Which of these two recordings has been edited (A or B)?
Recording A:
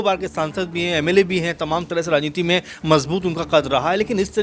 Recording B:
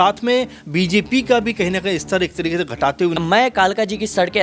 B